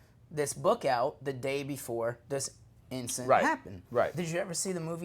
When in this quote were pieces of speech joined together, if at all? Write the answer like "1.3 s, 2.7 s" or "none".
4.1 s